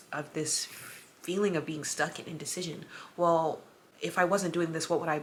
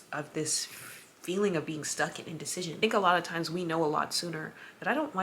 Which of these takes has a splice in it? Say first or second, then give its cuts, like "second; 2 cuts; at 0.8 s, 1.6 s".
second; 1 cut; at 2.8 s